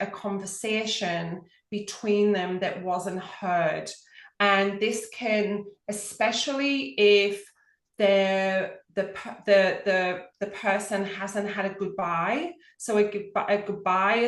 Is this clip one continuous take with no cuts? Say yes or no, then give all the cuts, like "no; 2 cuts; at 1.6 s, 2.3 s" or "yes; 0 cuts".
yes; 0 cuts